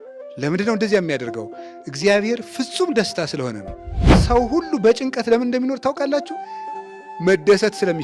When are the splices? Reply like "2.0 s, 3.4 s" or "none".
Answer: 4.2 s